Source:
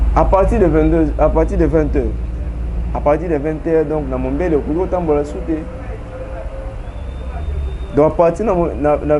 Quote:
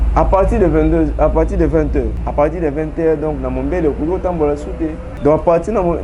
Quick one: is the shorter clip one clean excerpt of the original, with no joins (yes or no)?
no